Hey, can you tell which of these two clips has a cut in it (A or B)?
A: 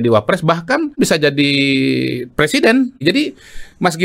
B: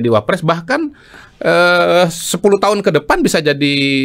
A